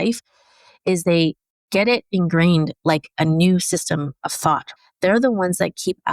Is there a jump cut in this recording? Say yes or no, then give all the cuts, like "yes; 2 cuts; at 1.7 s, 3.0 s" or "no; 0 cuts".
yes; 2 cuts; at 1.5 s, 4.7 s